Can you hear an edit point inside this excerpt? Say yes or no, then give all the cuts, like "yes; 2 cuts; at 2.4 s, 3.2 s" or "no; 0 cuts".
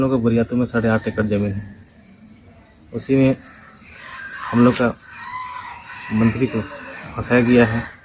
no; 0 cuts